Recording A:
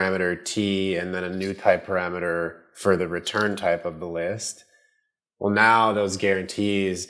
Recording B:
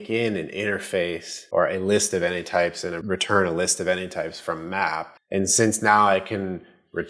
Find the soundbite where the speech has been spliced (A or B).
B